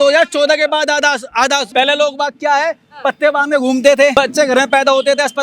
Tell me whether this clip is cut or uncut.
cut